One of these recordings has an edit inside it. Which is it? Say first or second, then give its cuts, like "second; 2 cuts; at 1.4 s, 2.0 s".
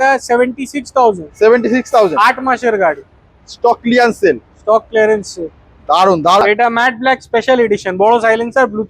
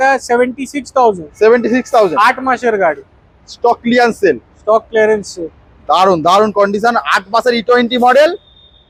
first; 1 cut; at 6.4 s